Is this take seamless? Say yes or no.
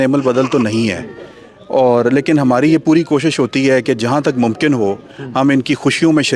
yes